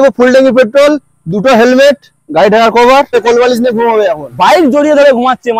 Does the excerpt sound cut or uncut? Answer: cut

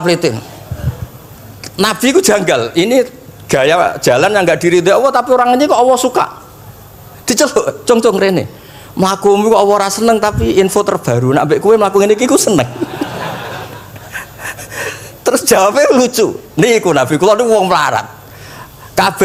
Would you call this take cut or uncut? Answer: uncut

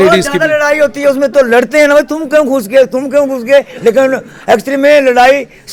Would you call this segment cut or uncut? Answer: uncut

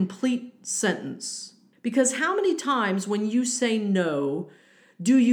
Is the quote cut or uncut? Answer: cut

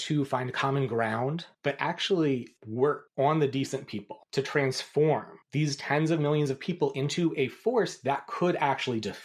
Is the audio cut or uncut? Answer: uncut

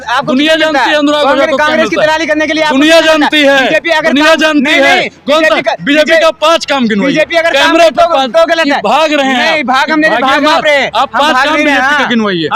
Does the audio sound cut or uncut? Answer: uncut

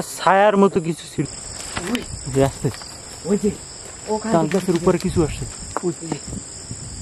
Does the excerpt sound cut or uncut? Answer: cut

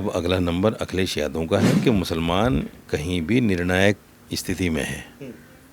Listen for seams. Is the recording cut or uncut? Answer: cut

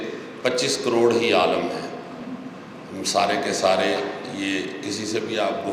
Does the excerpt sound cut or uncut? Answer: uncut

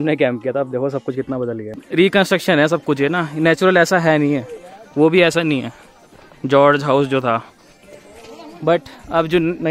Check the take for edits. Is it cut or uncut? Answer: cut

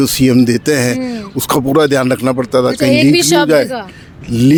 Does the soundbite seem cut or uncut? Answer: uncut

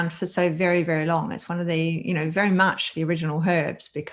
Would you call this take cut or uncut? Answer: uncut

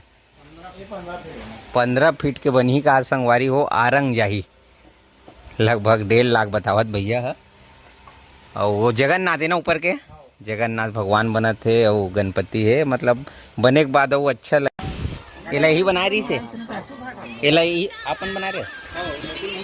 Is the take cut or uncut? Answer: cut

